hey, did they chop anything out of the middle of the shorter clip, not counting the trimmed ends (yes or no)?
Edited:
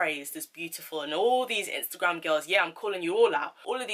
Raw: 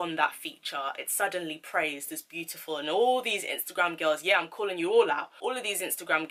no